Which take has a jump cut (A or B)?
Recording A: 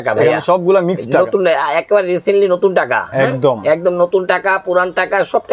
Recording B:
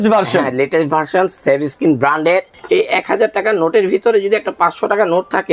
B